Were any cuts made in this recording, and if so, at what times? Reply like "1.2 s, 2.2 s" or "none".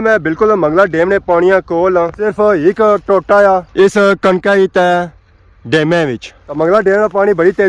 2.1 s, 6.4 s